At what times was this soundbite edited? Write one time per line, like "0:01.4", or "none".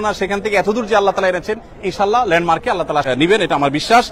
0:03.0

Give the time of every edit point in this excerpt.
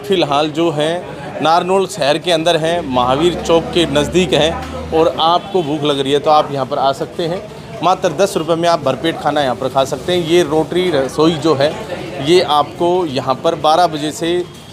none

